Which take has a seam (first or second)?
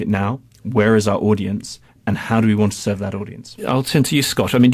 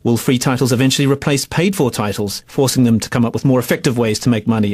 second